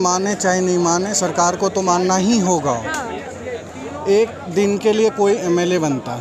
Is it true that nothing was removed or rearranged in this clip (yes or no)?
yes